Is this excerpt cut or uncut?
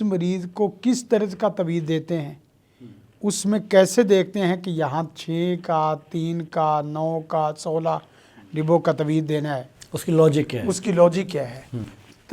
uncut